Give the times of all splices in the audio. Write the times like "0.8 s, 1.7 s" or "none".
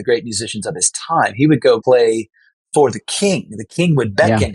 1.8 s